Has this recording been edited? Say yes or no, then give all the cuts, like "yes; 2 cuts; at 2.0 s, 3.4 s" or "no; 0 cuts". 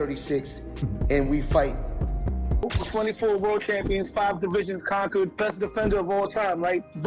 yes; 1 cut; at 2.7 s